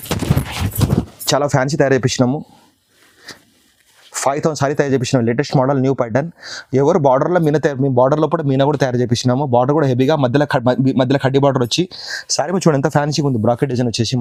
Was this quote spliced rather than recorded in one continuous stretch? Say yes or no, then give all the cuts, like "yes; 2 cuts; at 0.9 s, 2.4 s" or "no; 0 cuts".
no; 0 cuts